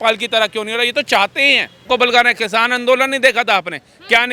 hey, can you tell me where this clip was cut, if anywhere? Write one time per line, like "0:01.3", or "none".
0:01.8